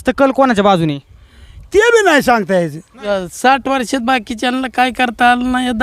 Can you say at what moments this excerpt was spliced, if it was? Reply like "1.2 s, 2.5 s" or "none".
2.9 s